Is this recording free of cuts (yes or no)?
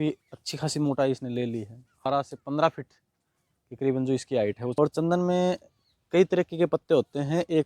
no